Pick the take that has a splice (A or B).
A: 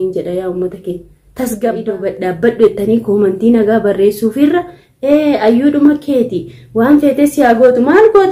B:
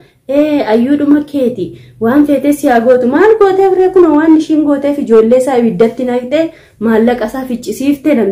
A